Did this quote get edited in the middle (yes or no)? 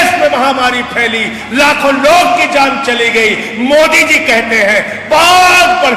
no